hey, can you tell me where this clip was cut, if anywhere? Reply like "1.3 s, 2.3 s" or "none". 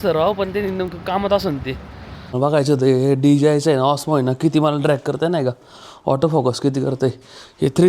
2.3 s